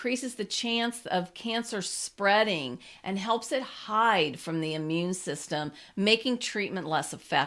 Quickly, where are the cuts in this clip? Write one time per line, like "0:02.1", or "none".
none